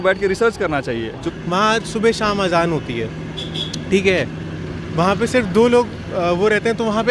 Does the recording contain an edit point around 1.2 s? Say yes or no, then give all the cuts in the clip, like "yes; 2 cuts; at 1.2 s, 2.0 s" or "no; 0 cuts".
yes; 1 cut; at 1.2 s